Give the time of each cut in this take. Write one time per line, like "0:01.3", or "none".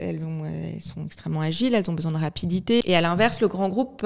0:02.8